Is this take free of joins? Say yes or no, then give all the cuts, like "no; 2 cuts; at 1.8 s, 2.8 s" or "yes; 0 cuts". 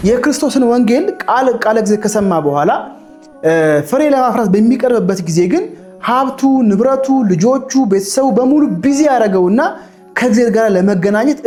yes; 0 cuts